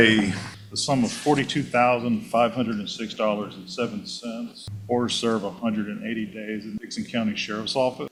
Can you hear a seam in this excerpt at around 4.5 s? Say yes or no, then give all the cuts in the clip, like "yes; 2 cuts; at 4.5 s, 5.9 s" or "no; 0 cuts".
no; 0 cuts